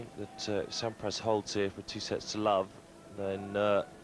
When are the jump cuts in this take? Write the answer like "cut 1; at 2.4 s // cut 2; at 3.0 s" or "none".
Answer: cut 1; at 1.9 s